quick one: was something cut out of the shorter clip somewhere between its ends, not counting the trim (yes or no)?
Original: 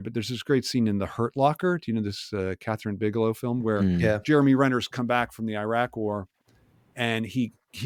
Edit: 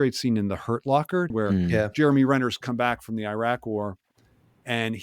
yes